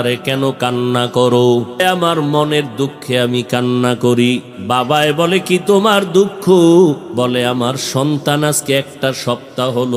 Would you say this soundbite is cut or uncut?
cut